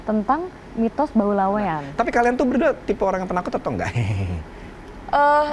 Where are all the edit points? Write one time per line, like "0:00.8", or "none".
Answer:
0:01.8

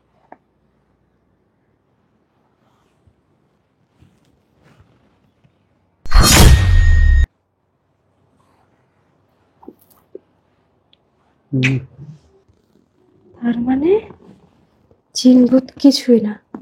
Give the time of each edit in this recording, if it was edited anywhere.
none

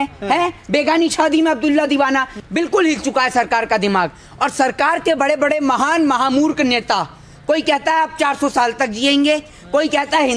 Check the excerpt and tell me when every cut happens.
0:02.3

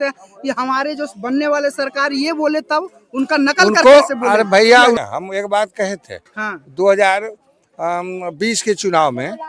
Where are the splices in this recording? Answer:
0:05.0

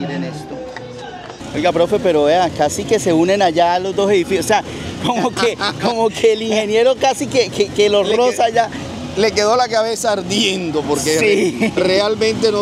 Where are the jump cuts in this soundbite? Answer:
0:01.4

